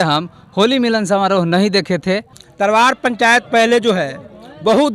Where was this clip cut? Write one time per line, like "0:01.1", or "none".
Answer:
0:02.3